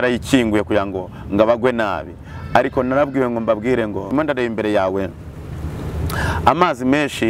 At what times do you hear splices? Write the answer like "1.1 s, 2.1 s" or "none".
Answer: 4.0 s